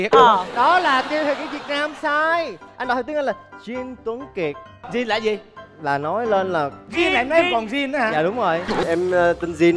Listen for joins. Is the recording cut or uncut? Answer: cut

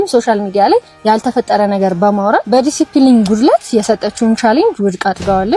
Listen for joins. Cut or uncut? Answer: uncut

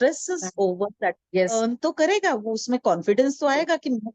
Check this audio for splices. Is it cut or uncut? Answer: cut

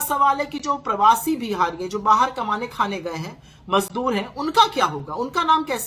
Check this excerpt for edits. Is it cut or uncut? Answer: uncut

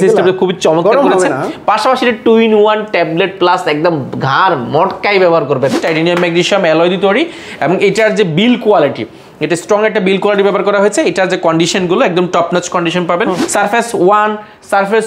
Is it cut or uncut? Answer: cut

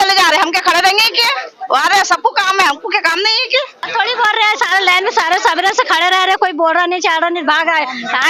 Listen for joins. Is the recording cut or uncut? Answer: uncut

